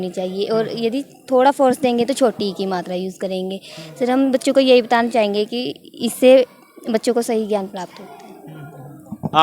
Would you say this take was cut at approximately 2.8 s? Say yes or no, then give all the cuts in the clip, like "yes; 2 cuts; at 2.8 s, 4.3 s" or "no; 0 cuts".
no; 0 cuts